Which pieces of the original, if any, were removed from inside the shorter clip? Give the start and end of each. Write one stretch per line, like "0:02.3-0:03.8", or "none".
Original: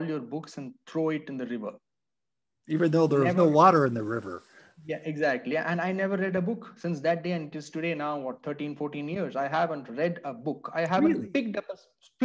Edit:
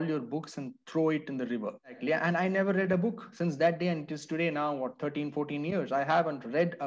0:02.0-0:05.4